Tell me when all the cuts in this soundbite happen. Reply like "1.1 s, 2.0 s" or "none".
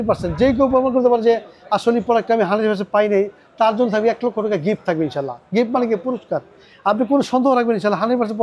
none